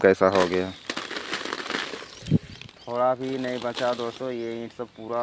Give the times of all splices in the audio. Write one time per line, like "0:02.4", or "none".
none